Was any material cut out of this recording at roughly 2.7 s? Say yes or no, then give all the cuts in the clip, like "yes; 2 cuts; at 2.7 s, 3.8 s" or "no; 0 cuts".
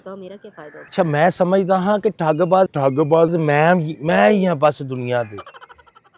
no; 1 cut; at 0.9 s